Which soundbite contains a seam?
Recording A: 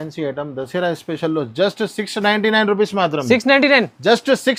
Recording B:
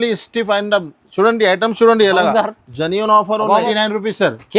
B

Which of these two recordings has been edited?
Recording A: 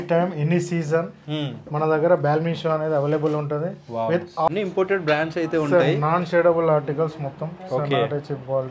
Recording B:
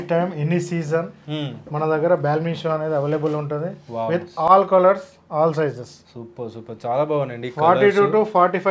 A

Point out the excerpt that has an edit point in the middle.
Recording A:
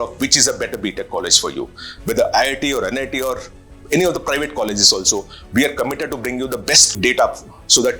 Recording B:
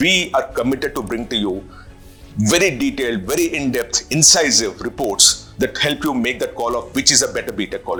A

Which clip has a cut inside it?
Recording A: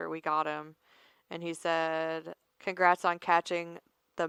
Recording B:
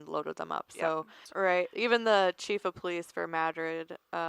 B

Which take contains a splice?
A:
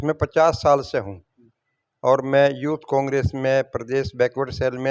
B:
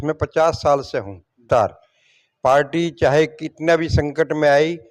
B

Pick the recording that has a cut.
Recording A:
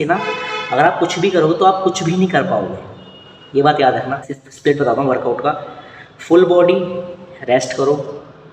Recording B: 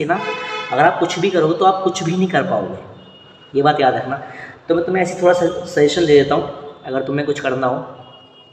A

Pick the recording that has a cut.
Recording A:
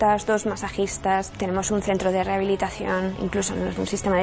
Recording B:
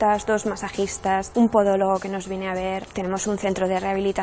A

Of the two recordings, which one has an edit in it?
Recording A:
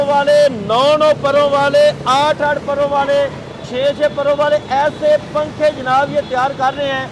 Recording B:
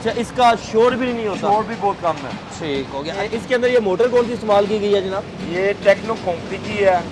B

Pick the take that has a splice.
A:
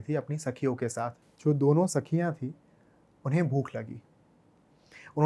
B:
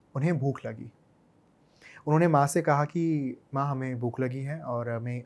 A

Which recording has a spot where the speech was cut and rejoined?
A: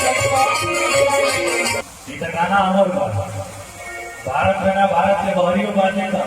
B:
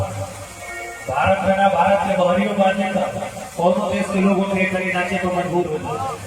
A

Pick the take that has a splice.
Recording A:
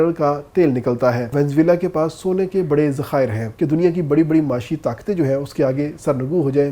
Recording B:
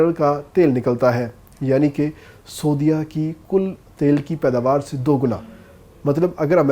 A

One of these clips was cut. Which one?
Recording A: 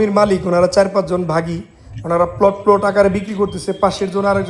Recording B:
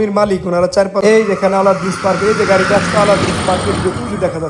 B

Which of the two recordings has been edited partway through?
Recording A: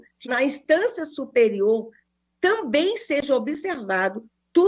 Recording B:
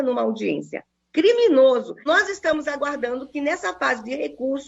B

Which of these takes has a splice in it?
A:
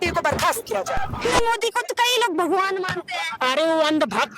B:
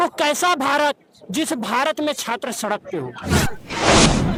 A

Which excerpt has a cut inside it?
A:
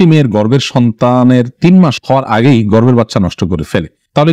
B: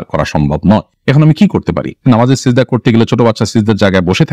B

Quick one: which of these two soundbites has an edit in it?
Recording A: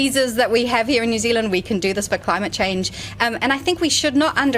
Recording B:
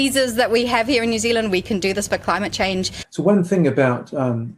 B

